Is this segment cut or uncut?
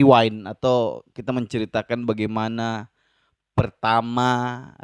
uncut